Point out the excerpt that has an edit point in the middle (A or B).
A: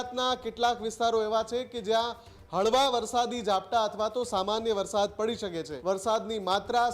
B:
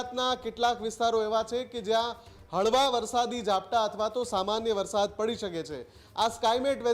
A